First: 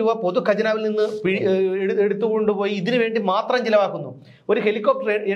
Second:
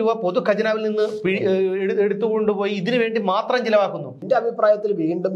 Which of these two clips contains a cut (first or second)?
second